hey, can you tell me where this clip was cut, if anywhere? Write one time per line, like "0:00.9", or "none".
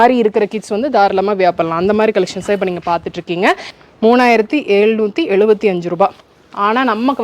0:03.7